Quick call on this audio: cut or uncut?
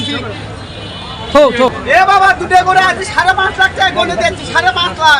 cut